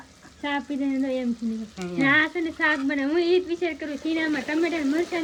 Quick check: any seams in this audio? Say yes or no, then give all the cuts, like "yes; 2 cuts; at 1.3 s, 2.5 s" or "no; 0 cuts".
no; 0 cuts